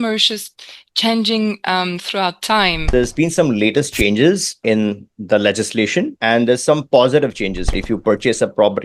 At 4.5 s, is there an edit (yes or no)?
no